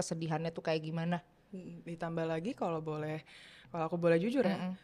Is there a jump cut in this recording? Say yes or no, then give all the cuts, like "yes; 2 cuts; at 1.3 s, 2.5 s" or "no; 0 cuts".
no; 0 cuts